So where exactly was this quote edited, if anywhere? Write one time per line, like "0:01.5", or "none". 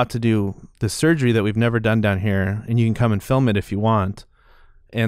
none